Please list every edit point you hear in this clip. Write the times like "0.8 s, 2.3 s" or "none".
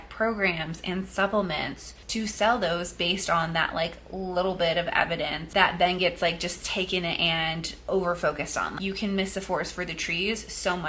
5.4 s, 8.7 s